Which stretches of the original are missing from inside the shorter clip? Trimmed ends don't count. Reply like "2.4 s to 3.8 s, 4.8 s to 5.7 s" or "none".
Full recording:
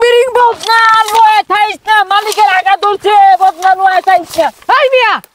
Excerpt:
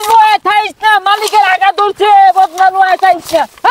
none